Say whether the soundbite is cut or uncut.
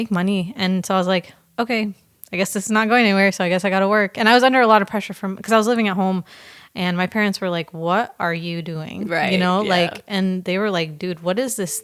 uncut